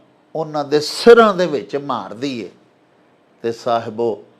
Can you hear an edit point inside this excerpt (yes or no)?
no